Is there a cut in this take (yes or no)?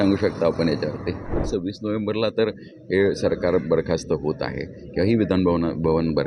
yes